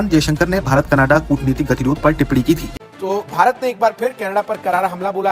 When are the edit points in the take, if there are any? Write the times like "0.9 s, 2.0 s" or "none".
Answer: 2.7 s